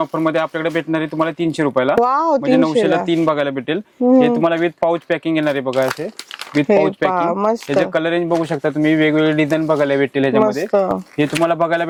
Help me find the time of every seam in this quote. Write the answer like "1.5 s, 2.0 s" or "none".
none